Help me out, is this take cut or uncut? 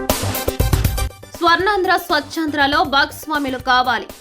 cut